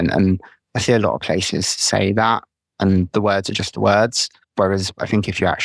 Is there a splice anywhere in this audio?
no; 0 cuts

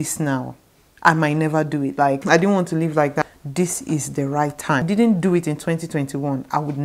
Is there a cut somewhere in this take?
yes; 3 cuts; at 2.2 s, 3.2 s, 4.9 s

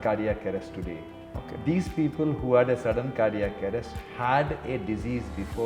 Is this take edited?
no; 0 cuts

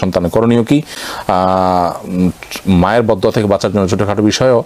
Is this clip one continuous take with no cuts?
yes; 0 cuts

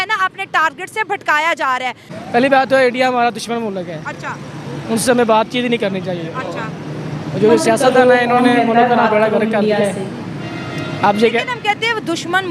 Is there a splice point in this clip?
yes; 1 cut; at 2.1 s

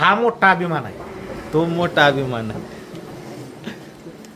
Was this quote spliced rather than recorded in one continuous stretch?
no; 0 cuts

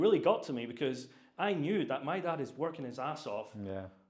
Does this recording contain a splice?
no; 0 cuts

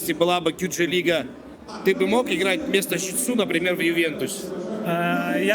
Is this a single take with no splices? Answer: yes; 0 cuts

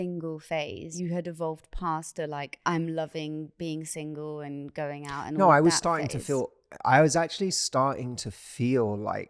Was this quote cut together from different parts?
yes; 2 cuts; at 0.9 s, 2.5 s

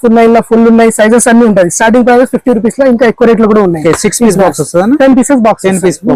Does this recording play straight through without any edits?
yes; 0 cuts

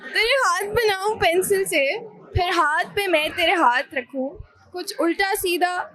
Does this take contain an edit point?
no; 0 cuts

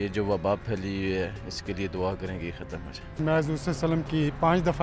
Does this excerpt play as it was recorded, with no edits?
no; 1 cut; at 3.2 s

